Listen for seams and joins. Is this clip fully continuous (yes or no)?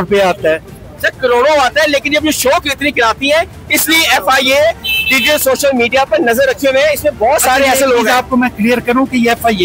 yes